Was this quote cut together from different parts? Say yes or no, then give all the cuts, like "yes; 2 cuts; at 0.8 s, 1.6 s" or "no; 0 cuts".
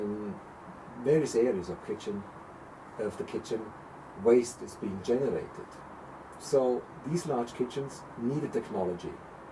no; 0 cuts